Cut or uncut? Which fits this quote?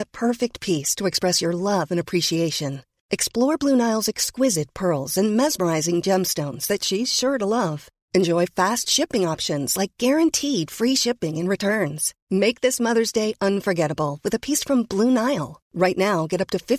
uncut